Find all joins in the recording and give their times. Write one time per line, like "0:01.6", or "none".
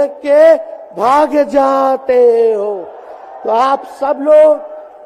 none